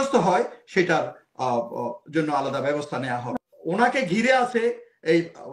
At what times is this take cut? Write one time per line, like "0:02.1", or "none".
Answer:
0:03.3